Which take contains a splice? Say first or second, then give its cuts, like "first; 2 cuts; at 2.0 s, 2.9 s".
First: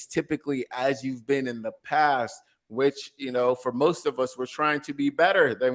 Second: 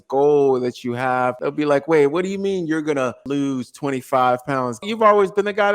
second; 3 cuts; at 1.4 s, 3.2 s, 4.9 s